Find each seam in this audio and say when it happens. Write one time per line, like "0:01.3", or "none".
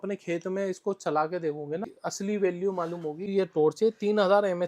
0:02.0
0:03.3